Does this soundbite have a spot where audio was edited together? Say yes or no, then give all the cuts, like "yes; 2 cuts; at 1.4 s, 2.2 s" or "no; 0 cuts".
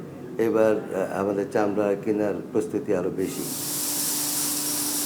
no; 0 cuts